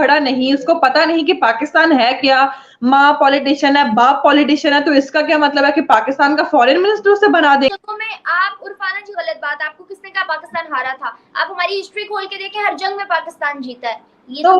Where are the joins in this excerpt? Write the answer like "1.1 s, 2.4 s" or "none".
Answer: 7.7 s

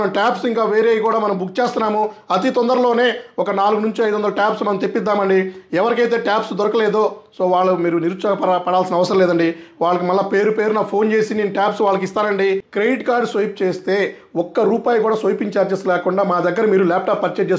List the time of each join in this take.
12.7 s

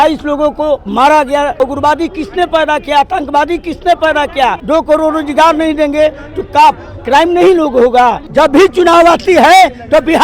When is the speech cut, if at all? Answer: 1.6 s, 4.6 s, 8.2 s

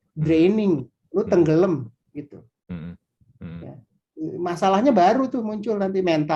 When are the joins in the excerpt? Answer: none

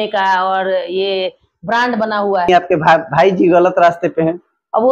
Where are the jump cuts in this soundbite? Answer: 2.5 s

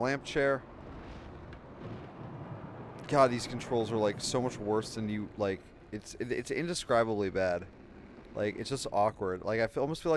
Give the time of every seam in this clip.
none

